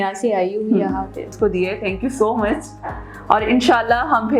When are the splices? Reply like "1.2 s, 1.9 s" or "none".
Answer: 1.3 s